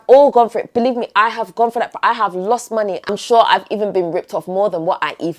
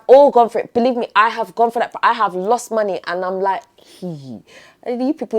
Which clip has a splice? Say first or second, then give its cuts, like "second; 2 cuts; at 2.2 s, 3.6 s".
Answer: first; 1 cut; at 3.1 s